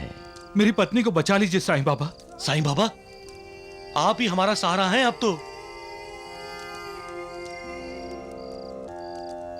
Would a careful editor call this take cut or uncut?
uncut